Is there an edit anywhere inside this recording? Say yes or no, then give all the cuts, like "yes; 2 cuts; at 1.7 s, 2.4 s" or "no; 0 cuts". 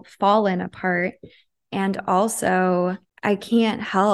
yes; 1 cut; at 3.1 s